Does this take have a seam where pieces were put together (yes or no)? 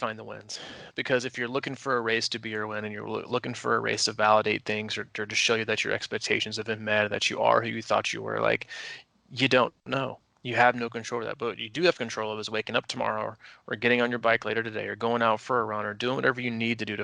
no